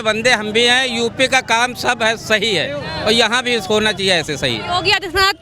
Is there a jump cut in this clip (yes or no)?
no